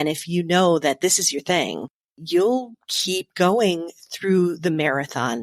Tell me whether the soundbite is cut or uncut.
uncut